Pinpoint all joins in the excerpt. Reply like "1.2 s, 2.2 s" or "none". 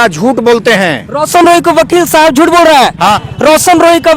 3.3 s